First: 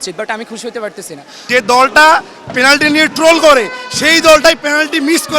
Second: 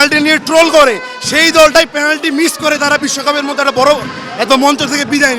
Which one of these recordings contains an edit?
first; 1 cut; at 1.4 s

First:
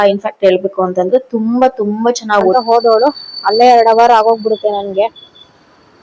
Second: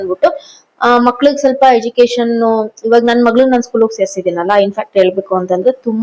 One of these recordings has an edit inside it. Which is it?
first; 1 cut; at 2.5 s

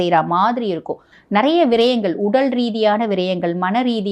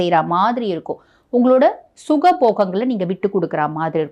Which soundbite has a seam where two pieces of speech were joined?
first; 1 cut; at 1.1 s

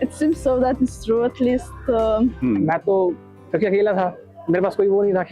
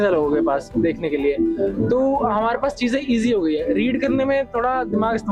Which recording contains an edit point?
first; 1 cut; at 2.4 s

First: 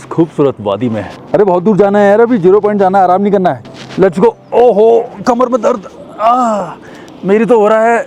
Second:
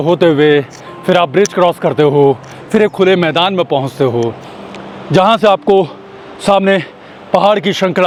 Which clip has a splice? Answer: first; 2 cuts; at 1.1 s, 3.6 s

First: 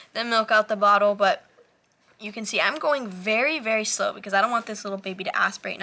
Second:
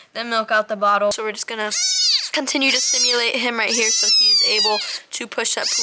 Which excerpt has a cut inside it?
second; 1 cut; at 1.2 s

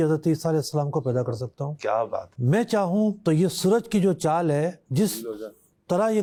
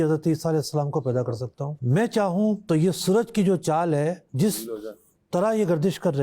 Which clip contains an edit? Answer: second; 1 cut; at 1.7 s

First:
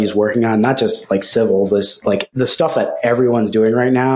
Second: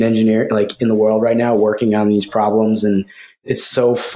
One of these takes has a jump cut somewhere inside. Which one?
first; 1 cut; at 2.3 s

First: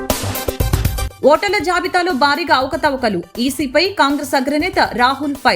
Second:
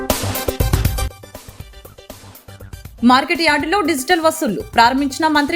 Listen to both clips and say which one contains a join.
first; 1 cut; at 1.1 s

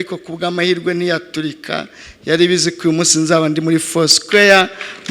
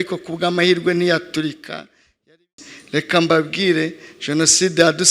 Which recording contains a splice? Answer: second; 1 cut; at 2.3 s

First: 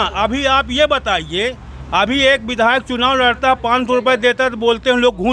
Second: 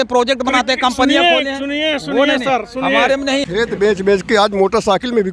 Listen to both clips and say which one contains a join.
second; 1 cut; at 3.4 s

